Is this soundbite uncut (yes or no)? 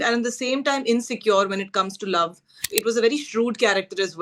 no